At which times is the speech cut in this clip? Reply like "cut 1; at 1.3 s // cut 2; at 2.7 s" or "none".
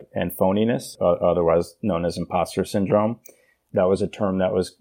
cut 1; at 0.9 s // cut 2; at 3.6 s